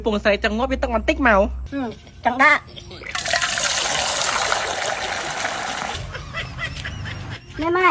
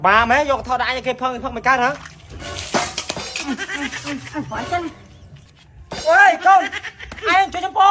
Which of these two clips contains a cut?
first; 2 cuts; at 1.6 s, 5.9 s

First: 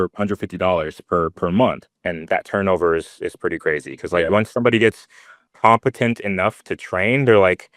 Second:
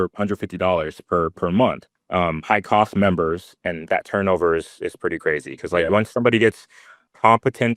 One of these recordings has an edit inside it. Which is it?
first; 1 cut; at 1.9 s

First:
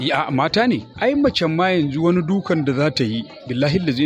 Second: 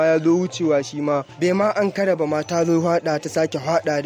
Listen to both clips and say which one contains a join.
first; 1 cut; at 0.9 s

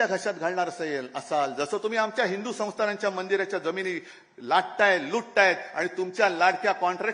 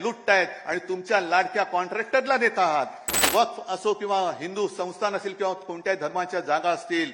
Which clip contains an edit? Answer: second; 1 cut; at 3.3 s

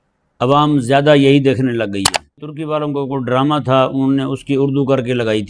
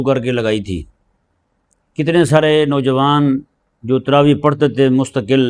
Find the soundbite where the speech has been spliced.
first; 1 cut; at 2.5 s

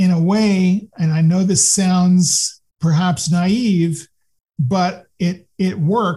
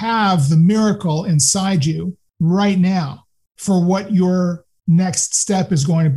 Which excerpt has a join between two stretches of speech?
second; 1 cut; at 2.2 s

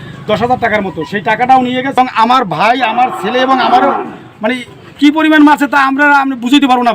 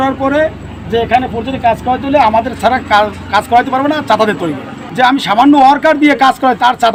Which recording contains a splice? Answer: first; 1 cut; at 2.0 s

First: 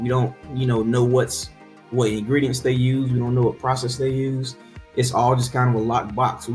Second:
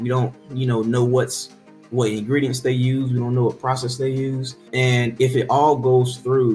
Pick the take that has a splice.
second; 1 cut; at 4.5 s

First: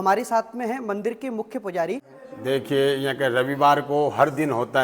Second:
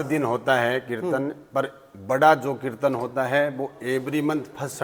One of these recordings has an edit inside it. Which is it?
first; 1 cut; at 2.1 s

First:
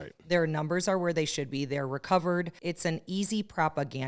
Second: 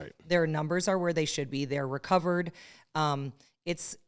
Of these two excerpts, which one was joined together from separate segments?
first; 1 cut; at 2.5 s

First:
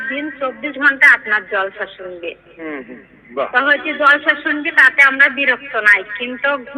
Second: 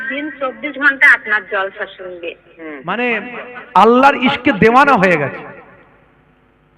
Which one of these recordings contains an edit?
second; 1 cut; at 2.8 s

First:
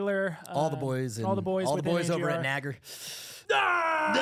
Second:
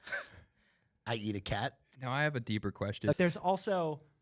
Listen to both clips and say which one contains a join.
second; 2 cuts; at 1.9 s, 3.2 s

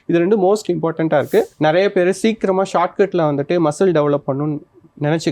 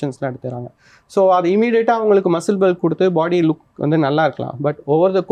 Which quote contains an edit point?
first; 1 cut; at 1.5 s

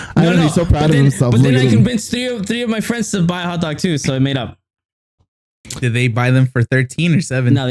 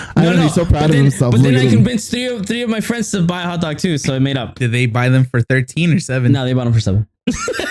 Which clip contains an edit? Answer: second; 1 cut; at 4.5 s

